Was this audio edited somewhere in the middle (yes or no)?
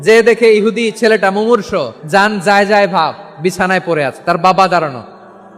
yes